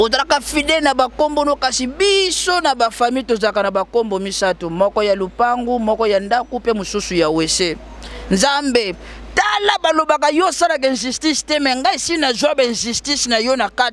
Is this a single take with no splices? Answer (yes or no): yes